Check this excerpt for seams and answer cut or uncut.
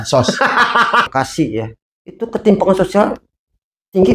cut